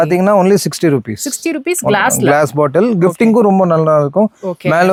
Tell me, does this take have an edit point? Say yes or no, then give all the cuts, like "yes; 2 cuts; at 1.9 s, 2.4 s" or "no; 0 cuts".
no; 0 cuts